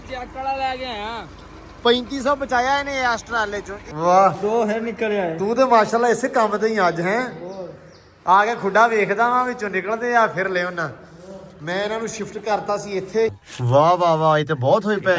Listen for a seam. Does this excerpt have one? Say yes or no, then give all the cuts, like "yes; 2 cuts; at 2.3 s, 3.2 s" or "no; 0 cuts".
yes; 2 cuts; at 3.8 s, 13.5 s